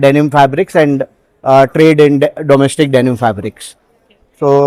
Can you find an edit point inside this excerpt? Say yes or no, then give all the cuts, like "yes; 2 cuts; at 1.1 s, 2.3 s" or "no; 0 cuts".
no; 0 cuts